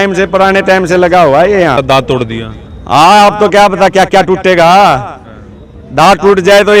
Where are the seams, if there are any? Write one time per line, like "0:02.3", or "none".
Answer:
0:01.8